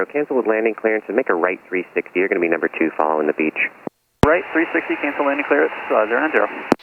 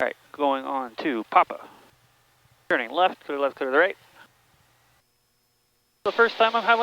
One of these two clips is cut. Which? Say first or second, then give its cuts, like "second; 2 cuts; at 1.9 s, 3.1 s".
second; 1 cut; at 5.0 s